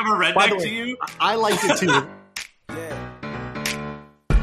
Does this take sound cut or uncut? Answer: cut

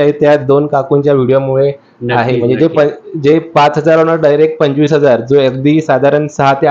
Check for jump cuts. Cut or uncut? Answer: uncut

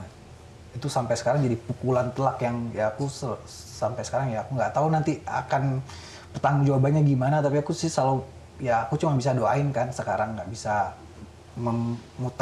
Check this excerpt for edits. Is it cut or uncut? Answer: uncut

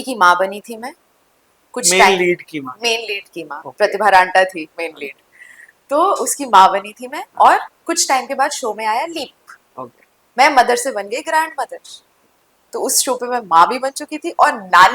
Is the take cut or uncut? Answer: uncut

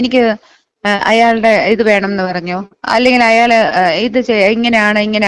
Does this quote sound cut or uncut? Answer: uncut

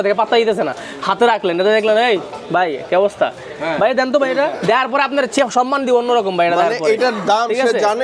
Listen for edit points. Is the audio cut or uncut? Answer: uncut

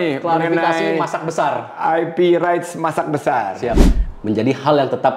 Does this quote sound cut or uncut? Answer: cut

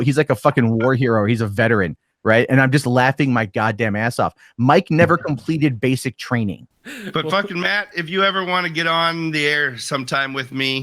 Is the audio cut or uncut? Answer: cut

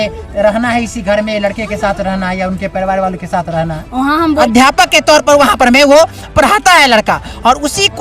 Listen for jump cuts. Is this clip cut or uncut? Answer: cut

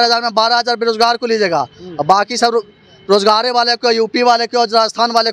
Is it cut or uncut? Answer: uncut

